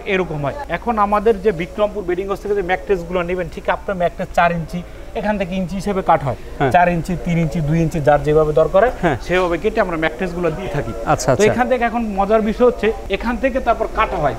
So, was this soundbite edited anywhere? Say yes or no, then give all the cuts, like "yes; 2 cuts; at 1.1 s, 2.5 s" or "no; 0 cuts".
no; 0 cuts